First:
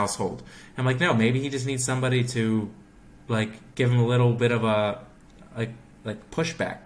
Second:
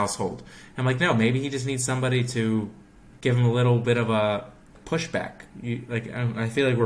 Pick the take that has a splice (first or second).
second